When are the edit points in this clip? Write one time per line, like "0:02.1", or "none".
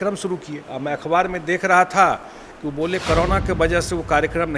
none

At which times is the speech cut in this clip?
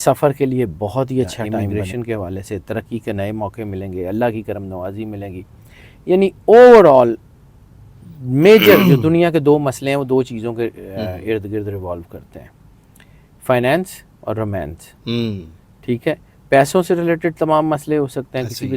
0:01.6

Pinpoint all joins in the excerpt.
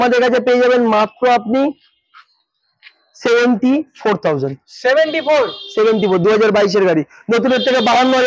none

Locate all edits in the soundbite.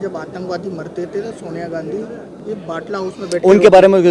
none

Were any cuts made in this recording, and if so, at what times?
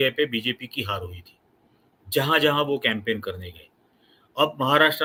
none

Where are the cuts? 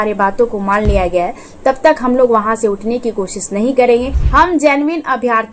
0:04.2

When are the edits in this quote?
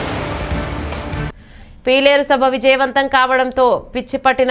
0:01.3

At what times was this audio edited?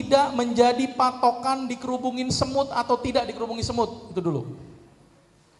none

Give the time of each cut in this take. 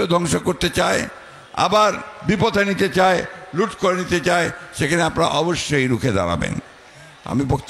none

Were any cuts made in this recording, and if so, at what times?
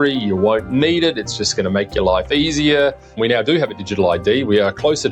0:03.2

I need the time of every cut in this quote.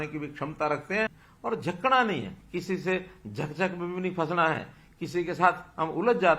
0:01.2

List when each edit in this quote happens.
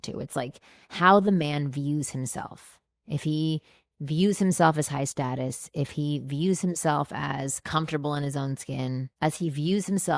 0:07.6
0:09.1

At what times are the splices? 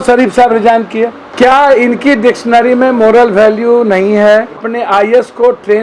0:01.2
0:04.7

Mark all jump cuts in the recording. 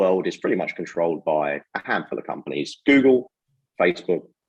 none

